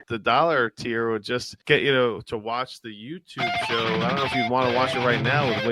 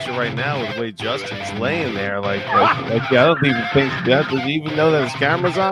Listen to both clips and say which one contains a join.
first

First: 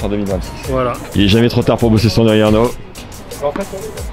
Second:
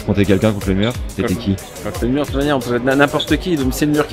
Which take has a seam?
first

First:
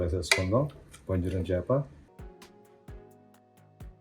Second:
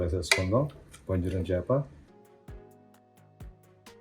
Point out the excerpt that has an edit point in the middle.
second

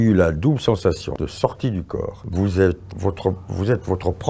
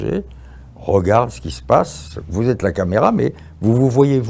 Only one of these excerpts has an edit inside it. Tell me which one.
first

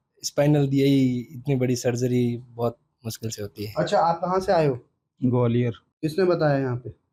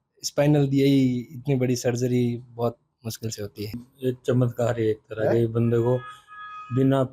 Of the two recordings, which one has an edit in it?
second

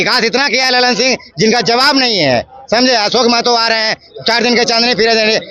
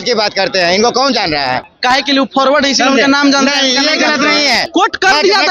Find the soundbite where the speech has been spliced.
second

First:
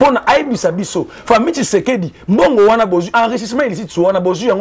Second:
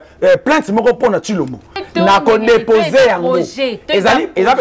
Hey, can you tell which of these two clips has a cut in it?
second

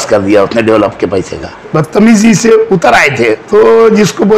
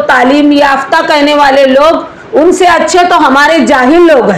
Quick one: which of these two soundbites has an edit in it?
first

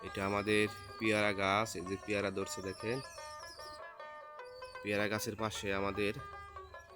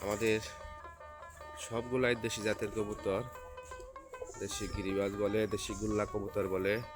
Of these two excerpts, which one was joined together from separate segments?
first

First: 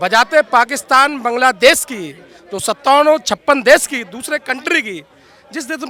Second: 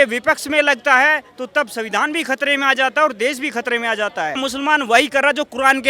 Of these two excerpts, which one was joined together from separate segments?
second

